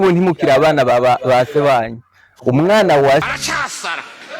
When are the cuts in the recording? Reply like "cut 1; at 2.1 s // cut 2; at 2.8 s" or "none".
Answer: cut 1; at 3.3 s